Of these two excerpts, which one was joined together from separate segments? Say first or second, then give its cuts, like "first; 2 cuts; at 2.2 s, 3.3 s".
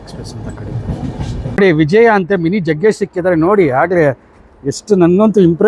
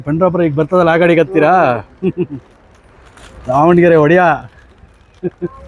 first; 1 cut; at 1.6 s